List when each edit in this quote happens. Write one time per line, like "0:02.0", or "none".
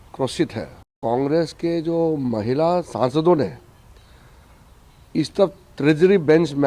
0:01.0

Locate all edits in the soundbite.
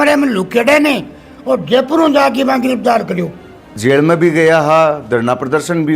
0:03.6

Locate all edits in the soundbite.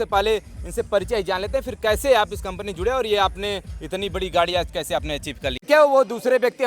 0:05.6

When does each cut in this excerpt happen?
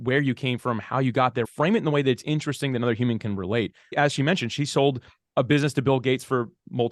0:01.5
0:03.9

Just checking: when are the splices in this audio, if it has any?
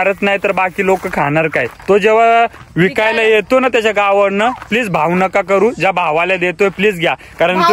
0:01.7

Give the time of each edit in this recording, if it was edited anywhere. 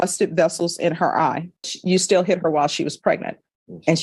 0:01.7

